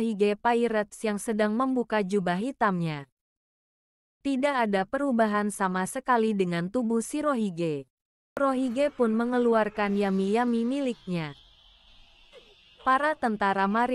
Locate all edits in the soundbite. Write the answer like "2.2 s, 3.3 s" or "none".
8.4 s